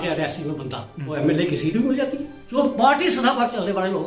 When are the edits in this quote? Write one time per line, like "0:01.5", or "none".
0:01.1
0:02.6